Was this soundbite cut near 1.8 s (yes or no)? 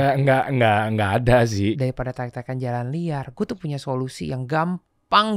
yes